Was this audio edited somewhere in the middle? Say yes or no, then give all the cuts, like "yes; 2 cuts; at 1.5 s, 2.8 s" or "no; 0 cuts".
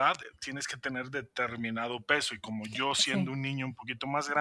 no; 0 cuts